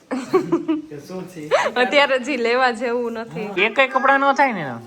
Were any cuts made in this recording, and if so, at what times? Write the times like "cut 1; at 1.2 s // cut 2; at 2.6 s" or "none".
cut 1; at 3.6 s